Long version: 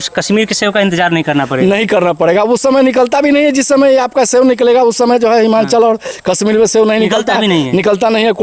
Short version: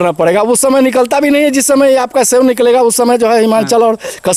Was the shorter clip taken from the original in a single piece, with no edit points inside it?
yes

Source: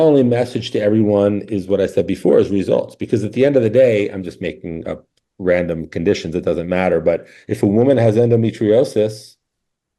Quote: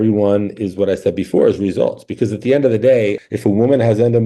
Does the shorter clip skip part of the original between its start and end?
yes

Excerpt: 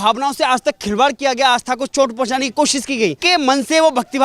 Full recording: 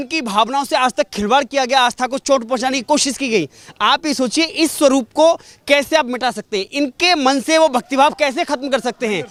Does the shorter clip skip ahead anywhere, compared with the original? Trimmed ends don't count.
yes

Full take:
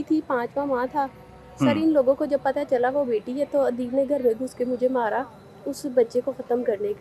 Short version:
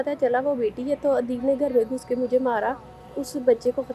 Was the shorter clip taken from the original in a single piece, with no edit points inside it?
yes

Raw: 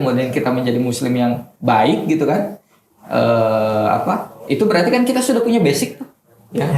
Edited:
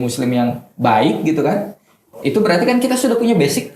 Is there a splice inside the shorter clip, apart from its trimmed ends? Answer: yes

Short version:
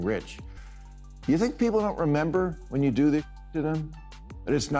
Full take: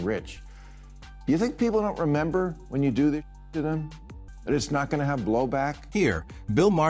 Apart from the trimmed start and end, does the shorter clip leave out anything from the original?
no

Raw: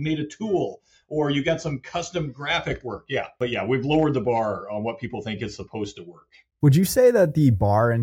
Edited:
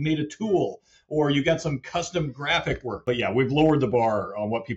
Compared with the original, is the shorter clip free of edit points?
no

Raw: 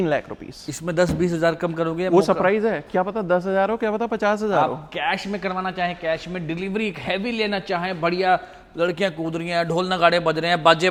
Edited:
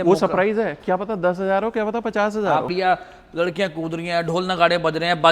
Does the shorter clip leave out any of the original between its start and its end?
yes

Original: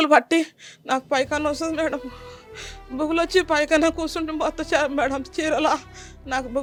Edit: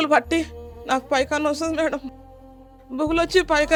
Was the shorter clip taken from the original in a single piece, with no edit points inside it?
yes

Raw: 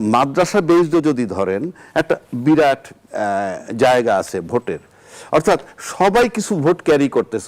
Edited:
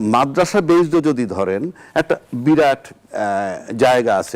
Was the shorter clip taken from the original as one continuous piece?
yes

